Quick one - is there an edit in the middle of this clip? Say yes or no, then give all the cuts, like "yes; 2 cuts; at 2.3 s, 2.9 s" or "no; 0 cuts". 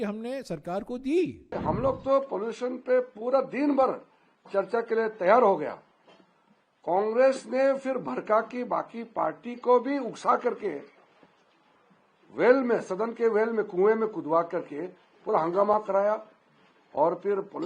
yes; 1 cut; at 1.5 s